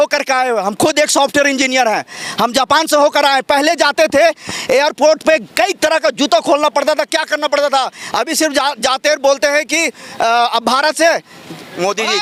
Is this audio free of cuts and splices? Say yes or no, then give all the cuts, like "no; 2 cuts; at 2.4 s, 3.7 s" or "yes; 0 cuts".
yes; 0 cuts